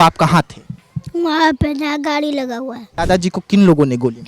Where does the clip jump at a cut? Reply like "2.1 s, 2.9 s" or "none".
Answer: 2.8 s